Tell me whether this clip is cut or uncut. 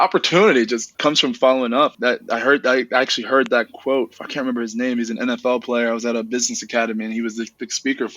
cut